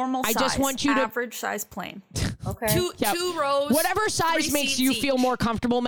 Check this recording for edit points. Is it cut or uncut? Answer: uncut